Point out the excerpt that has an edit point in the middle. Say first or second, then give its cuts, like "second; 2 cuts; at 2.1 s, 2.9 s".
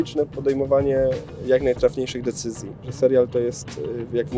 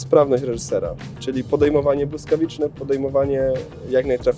first; 1 cut; at 2.9 s